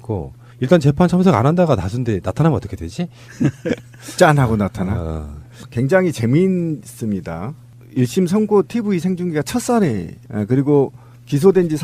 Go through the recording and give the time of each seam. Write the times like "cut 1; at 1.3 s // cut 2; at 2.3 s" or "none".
none